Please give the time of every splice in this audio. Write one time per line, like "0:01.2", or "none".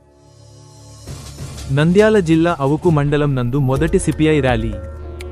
none

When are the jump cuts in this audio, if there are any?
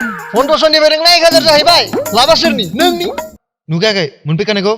0:03.3

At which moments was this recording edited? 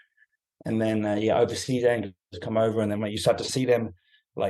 0:02.2
0:03.5

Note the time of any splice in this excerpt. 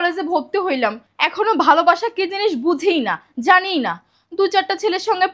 none

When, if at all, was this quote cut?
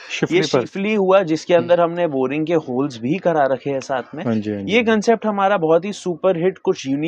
none

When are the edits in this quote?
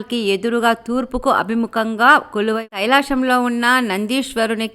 0:02.7

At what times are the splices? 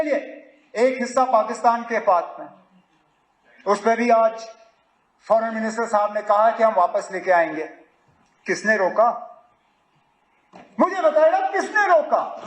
none

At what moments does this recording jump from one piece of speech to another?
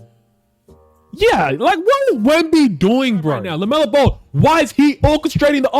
0:03.4

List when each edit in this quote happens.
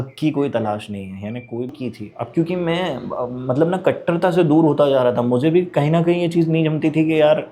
0:01.7

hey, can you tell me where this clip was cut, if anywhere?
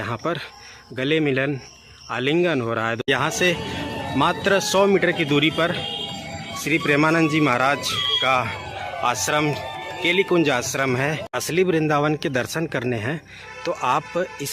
0:03.1
0:11.3

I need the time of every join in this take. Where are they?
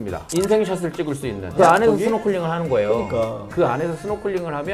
0:01.6

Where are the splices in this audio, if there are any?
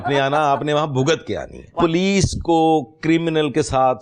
0:01.6

